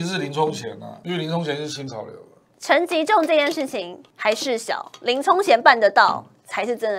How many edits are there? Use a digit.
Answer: 3